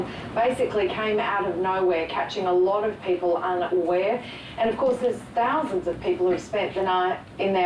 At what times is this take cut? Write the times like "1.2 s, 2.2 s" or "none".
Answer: 2.1 s